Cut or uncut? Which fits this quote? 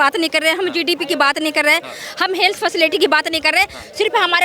uncut